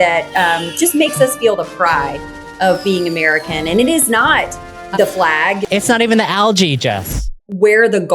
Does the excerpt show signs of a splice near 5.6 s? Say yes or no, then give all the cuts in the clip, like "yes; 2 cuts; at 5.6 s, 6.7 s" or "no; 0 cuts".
yes; 2 cuts; at 5.6 s, 7.1 s